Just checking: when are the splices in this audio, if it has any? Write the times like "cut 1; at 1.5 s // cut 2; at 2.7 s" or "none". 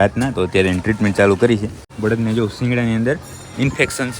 cut 1; at 1.8 s

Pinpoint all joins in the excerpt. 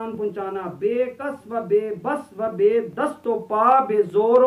none

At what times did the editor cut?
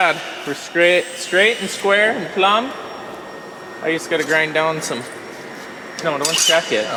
none

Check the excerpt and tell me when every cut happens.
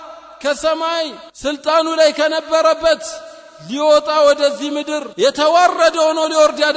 cut 1; at 1.2 s // cut 2; at 5.0 s

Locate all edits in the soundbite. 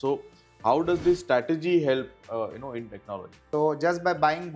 cut 1; at 3.4 s

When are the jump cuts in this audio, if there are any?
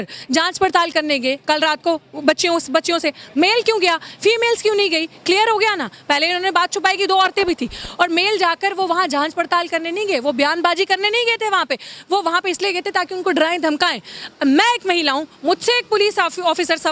none

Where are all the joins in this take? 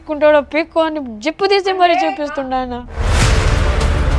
none

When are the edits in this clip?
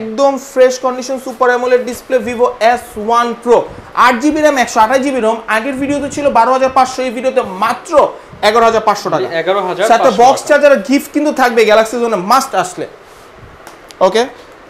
none

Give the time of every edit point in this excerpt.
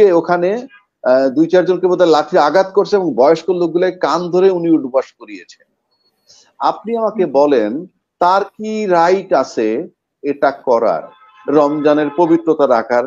none

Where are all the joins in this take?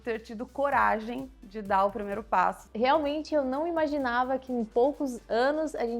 cut 1; at 2.6 s

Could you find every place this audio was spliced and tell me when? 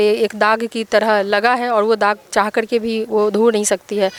none

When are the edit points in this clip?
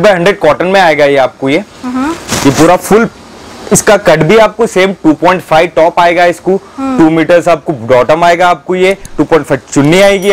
none

